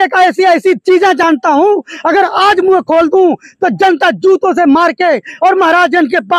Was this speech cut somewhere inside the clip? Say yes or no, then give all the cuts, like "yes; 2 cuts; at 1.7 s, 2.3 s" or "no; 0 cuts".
no; 0 cuts